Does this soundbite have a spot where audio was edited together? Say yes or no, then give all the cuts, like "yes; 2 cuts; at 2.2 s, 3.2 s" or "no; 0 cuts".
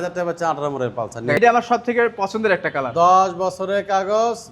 yes; 1 cut; at 1.4 s